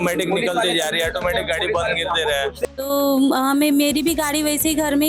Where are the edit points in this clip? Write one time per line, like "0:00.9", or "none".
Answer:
0:02.7